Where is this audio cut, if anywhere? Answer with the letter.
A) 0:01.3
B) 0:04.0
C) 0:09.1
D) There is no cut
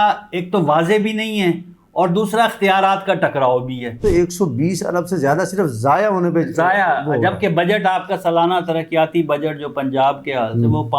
B